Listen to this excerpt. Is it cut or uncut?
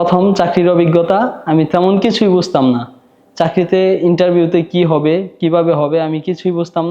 uncut